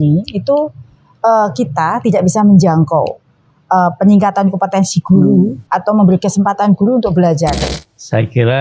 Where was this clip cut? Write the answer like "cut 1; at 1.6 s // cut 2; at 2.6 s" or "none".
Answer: cut 1; at 7.6 s